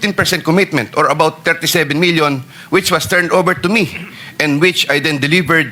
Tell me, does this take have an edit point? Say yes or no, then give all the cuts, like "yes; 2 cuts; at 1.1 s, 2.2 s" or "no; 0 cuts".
no; 0 cuts